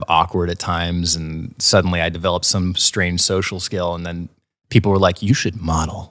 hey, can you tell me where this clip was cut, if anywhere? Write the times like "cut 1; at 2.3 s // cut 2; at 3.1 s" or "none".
none